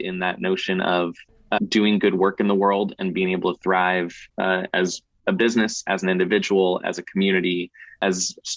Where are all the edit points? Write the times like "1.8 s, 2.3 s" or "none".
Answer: none